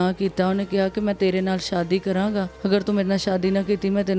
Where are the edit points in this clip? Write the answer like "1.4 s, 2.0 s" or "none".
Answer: 2.5 s